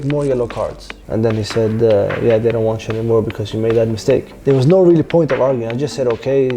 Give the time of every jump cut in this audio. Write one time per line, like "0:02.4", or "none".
0:01.0
0:04.3